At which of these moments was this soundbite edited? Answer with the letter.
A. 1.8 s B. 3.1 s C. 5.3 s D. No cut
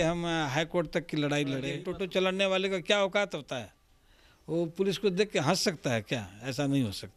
A